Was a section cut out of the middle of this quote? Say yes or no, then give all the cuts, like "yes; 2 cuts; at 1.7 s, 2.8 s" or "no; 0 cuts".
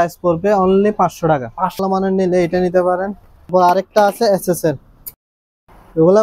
yes; 3 cuts; at 1.8 s, 3.5 s, 5.0 s